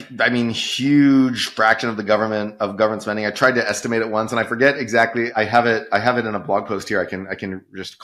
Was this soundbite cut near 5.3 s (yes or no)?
yes